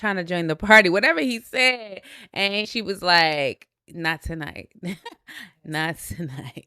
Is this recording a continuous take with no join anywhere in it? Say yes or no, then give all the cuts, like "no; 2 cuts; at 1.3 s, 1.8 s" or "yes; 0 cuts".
no; 1 cut; at 2.6 s